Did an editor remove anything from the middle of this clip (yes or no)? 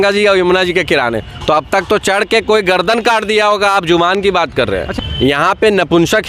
yes